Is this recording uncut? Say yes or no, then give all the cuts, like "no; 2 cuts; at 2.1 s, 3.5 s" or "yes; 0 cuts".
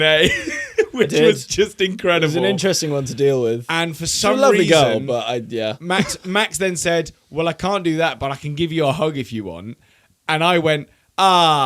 yes; 0 cuts